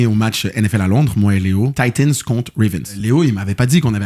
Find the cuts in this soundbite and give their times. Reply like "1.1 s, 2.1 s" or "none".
1.7 s, 3.0 s

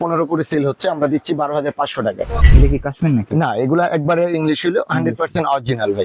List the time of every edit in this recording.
2.4 s

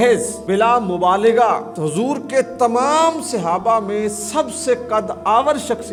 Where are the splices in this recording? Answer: none

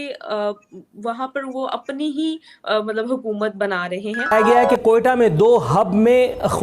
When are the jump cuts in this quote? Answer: 4.3 s

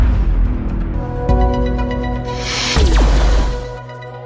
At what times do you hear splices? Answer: 1.1 s

